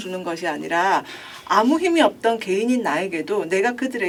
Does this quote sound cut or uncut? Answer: uncut